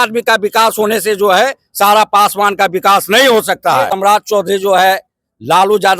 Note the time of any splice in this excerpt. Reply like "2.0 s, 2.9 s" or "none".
3.9 s